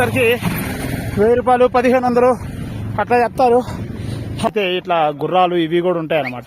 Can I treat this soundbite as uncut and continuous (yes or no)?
no